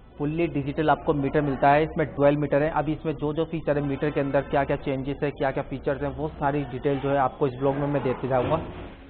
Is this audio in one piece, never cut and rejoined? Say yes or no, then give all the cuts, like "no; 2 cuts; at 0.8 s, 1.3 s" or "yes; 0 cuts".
yes; 0 cuts